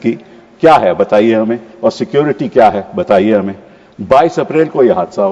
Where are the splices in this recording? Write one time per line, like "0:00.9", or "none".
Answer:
none